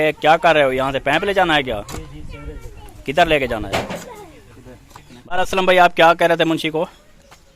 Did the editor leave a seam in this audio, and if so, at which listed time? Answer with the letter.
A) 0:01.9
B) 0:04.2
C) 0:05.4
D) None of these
C